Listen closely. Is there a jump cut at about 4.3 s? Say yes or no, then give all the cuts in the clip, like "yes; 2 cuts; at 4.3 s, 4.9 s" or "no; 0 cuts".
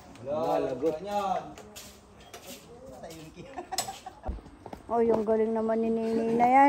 yes; 1 cut; at 4.3 s